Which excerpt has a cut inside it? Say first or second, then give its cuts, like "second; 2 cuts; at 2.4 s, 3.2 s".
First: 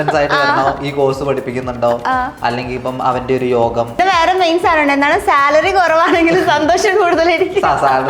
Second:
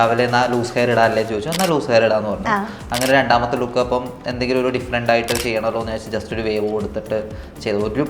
first; 1 cut; at 4.0 s